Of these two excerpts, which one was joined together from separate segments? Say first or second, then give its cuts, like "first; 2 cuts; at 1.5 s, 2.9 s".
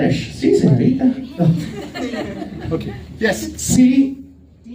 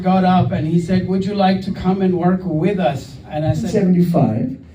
second; 1 cut; at 3.7 s